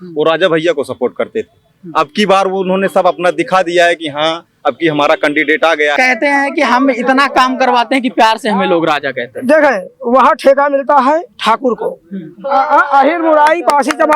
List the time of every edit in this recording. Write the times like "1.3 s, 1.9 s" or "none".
6.0 s